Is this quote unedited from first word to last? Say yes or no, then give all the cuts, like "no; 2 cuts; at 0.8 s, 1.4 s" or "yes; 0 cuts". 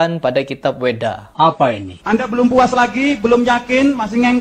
no; 1 cut; at 1.7 s